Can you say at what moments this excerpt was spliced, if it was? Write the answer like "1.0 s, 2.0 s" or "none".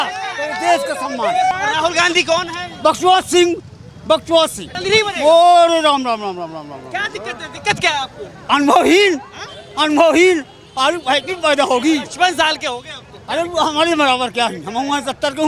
1.5 s, 4.7 s